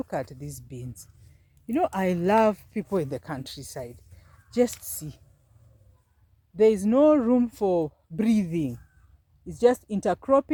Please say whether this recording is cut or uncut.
uncut